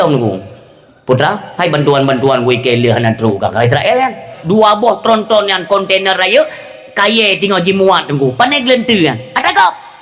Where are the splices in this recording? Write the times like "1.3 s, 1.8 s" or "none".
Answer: 4.3 s